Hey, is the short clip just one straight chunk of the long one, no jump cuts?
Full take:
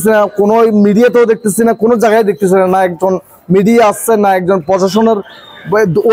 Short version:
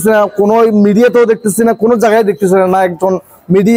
yes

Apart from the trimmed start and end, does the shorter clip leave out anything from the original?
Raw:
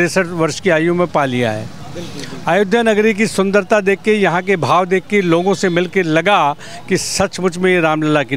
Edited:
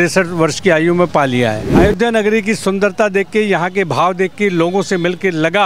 yes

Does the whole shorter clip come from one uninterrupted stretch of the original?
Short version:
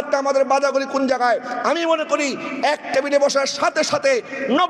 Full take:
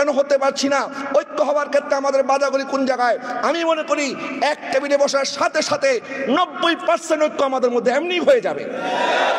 yes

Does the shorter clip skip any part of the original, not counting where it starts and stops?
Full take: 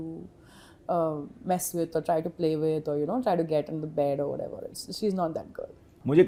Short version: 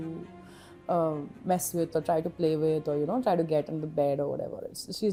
no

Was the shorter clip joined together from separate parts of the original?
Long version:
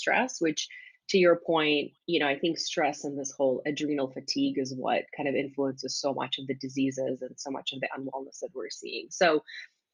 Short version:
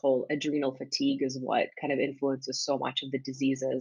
no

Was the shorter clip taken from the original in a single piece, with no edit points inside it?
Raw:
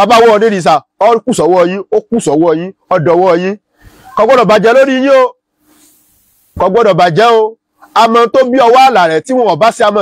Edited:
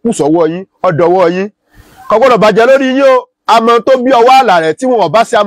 no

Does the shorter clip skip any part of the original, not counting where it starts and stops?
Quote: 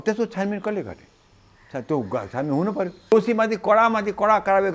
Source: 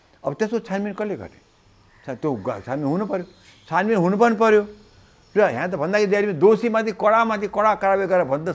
yes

